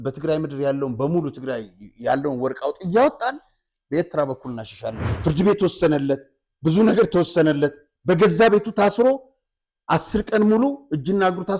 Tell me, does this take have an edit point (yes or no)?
yes